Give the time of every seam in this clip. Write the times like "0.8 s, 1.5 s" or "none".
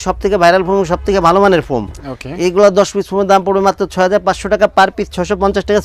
none

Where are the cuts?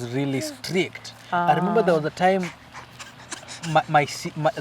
none

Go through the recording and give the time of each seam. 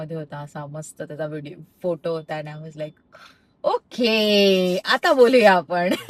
none

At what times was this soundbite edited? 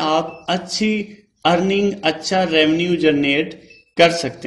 none

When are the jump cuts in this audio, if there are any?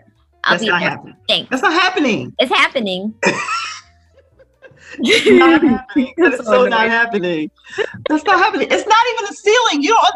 none

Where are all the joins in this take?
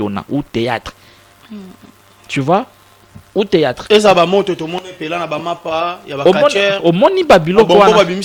none

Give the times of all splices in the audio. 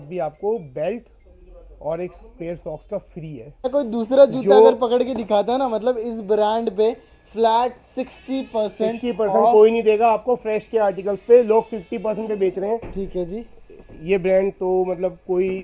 3.6 s

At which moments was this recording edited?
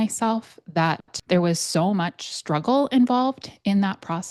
1.1 s

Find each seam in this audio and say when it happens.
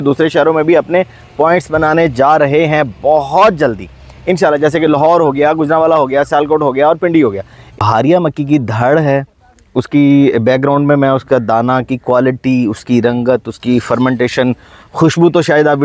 7.7 s

